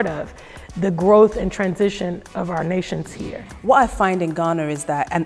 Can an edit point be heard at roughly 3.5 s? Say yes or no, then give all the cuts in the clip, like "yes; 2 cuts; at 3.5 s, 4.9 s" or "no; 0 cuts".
yes; 1 cut; at 3.5 s